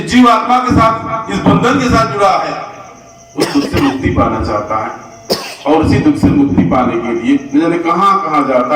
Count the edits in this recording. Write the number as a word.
zero